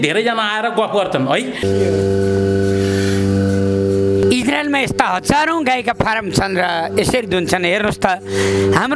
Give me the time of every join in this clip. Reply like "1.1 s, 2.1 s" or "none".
1.5 s, 4.3 s